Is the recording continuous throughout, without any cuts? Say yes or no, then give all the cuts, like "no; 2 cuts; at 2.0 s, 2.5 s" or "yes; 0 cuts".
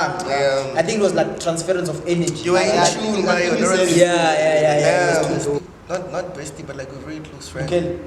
no; 1 cut; at 5.6 s